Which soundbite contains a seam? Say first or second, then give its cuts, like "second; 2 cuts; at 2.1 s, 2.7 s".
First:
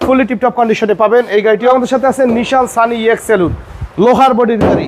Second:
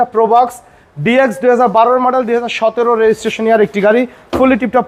first; 1 cut; at 1.7 s